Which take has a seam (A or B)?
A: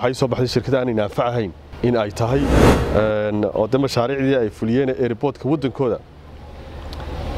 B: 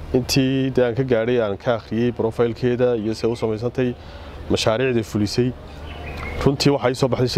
A